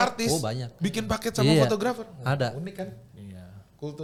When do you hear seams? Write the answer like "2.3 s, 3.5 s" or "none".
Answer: none